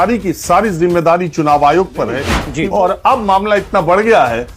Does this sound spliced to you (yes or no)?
yes